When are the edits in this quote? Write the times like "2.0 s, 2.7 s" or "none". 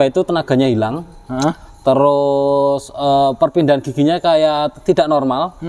none